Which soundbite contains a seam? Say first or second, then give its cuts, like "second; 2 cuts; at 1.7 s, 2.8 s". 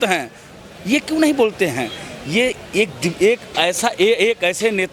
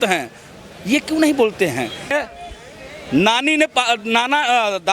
second; 1 cut; at 2.1 s